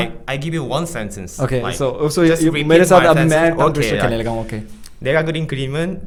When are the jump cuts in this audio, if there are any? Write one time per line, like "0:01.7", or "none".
none